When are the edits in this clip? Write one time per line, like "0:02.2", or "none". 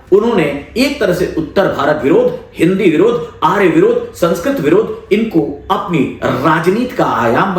none